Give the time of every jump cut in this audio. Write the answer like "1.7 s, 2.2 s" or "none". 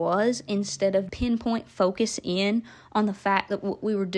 1.1 s